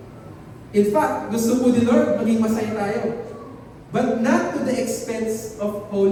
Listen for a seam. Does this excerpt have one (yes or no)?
no